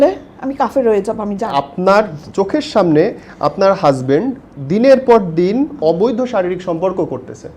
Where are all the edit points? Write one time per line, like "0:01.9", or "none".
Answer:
0:01.5